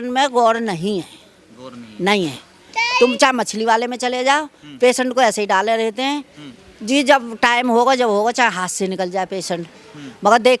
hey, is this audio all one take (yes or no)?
yes